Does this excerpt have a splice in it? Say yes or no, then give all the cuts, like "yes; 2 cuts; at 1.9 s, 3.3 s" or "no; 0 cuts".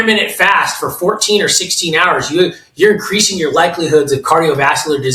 no; 0 cuts